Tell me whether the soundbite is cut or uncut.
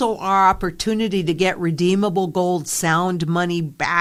uncut